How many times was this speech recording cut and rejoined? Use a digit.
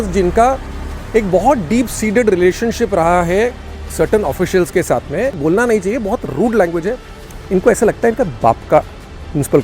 1